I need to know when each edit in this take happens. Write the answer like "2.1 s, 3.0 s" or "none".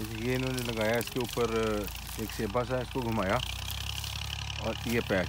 none